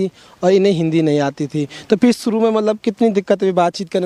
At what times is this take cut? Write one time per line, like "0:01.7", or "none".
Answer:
none